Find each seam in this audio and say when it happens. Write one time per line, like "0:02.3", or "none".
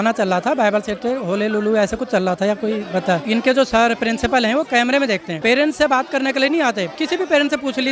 0:03.2
0:05.3
0:06.9